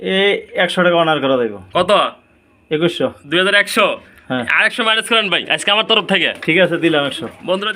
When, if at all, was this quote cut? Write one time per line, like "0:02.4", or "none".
none